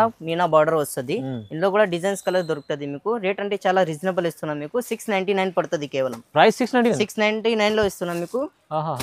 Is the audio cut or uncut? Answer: uncut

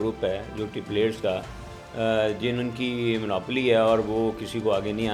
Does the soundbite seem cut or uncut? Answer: uncut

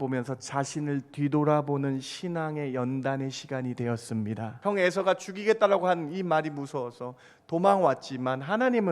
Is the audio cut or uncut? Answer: cut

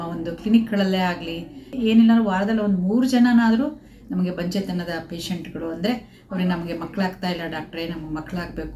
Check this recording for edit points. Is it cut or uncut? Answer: cut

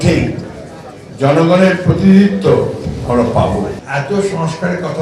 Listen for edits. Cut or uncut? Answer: cut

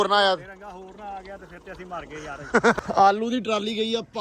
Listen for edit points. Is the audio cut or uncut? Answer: cut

